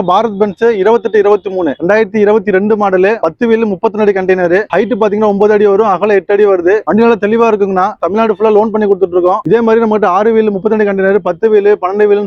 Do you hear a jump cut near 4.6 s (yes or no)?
no